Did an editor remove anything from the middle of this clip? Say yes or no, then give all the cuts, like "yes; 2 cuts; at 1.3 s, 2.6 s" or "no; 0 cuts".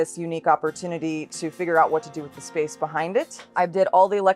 yes; 1 cut; at 3.5 s